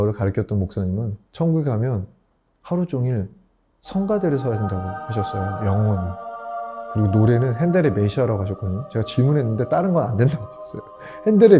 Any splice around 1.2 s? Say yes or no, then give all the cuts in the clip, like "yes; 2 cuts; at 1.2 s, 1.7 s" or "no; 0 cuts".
yes; 1 cut; at 1.2 s